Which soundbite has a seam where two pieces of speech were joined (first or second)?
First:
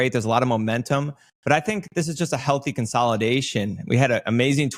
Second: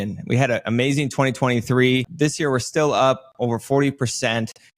second